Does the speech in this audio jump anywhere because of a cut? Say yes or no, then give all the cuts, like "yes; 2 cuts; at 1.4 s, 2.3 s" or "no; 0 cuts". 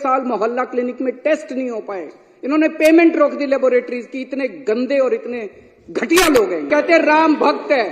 yes; 1 cut; at 6.7 s